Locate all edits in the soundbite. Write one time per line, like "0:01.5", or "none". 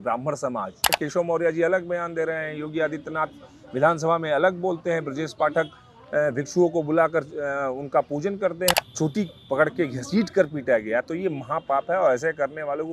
0:00.9
0:08.7

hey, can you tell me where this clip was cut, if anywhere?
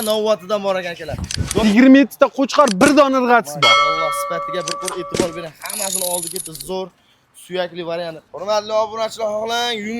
0:01.6
0:08.3

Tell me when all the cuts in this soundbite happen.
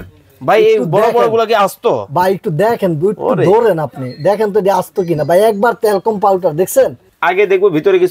0:07.0

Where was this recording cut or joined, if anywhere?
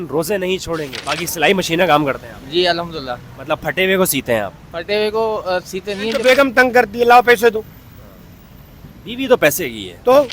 0:01.0
0:06.6

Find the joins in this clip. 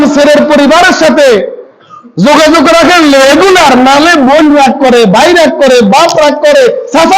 none

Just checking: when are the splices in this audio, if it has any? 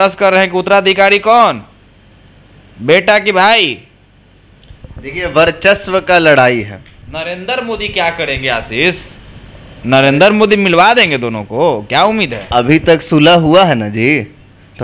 none

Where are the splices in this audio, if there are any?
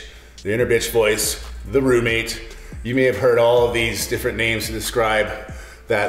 none

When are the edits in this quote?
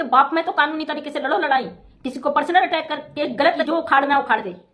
0:03.6

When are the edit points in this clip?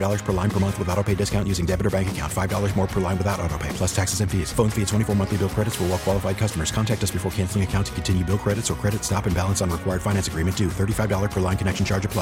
none

